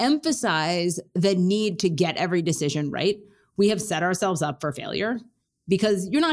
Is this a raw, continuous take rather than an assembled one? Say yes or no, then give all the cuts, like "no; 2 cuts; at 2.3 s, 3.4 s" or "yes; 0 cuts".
no; 1 cut; at 1.0 s